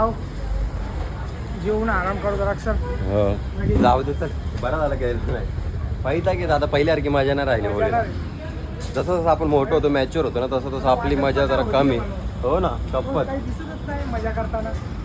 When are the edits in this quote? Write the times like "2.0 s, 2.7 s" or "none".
none